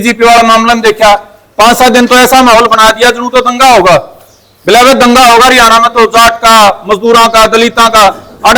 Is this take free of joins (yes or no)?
yes